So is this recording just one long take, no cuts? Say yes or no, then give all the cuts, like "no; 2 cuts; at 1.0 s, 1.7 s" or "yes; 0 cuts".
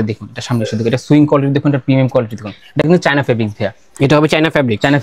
yes; 0 cuts